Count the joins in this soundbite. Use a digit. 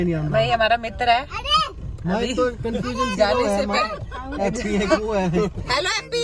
0